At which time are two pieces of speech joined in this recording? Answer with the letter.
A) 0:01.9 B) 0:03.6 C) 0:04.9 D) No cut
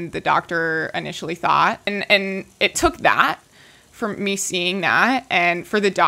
A